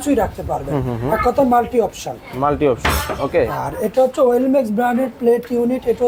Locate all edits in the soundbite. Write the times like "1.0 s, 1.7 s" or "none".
none